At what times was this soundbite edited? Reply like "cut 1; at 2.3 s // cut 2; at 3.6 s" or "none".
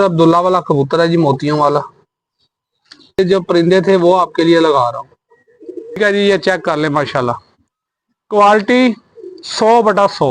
cut 1; at 3.2 s // cut 2; at 6.0 s